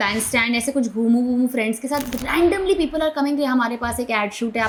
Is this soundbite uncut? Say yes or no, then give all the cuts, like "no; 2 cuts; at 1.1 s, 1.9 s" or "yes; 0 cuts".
yes; 0 cuts